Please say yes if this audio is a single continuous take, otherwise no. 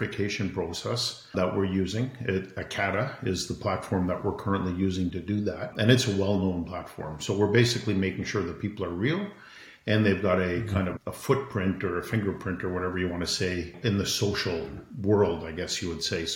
no